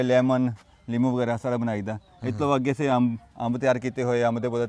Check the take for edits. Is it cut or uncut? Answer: uncut